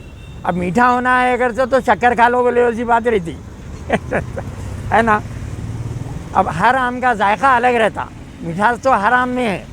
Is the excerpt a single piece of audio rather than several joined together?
yes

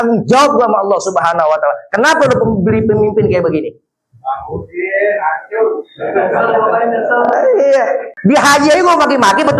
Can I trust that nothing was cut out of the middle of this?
no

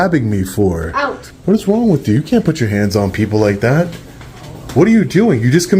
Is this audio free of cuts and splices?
no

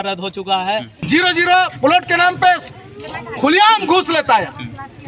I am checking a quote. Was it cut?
yes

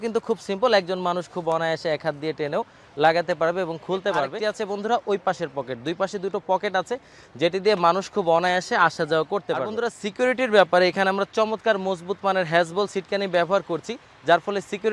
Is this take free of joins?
no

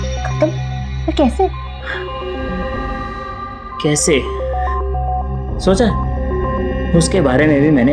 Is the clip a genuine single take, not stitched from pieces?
yes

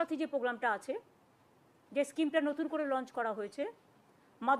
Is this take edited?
no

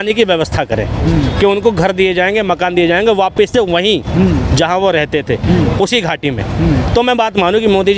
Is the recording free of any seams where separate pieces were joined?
yes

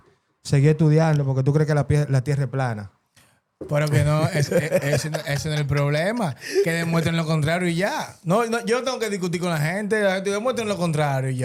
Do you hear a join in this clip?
no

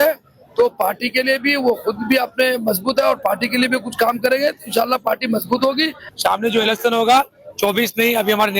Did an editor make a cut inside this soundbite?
yes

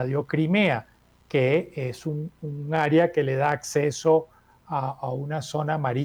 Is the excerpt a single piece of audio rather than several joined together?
yes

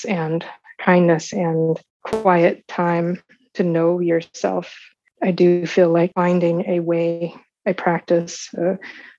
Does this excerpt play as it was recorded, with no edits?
no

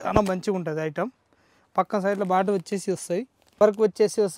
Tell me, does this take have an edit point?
yes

